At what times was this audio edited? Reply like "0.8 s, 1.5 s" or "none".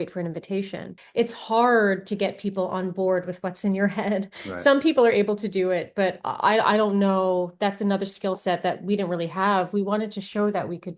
1.0 s